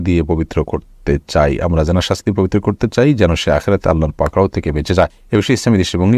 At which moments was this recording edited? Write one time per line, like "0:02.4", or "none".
0:05.2